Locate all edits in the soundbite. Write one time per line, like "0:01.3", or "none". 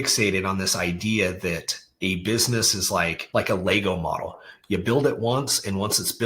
0:03.2